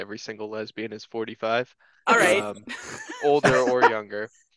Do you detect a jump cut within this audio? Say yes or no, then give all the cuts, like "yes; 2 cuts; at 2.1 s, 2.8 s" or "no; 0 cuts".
no; 0 cuts